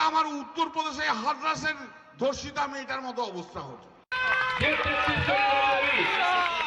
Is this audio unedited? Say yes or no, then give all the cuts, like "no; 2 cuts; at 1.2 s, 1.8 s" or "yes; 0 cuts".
no; 1 cut; at 4.0 s